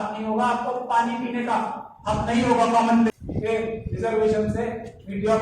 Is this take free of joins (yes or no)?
no